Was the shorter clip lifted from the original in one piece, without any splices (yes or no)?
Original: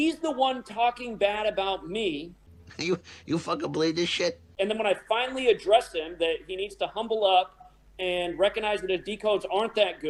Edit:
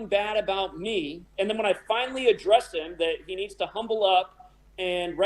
no